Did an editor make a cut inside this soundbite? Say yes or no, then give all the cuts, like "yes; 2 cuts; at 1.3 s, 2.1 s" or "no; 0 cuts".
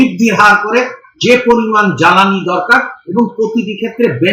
no; 0 cuts